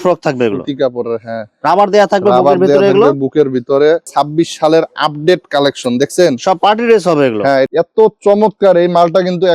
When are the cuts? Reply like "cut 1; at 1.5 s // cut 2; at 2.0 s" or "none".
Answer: cut 1; at 4.1 s // cut 2; at 7.7 s